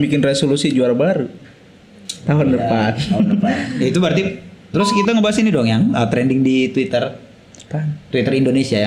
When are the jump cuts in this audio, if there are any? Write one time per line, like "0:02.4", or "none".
0:04.7